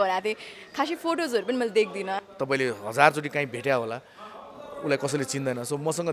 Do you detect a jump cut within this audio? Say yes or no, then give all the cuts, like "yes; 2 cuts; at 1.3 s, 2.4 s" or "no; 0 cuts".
yes; 1 cut; at 2.2 s